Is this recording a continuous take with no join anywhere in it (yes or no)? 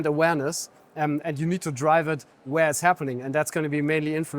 yes